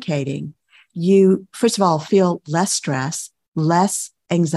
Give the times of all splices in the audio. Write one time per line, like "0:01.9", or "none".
none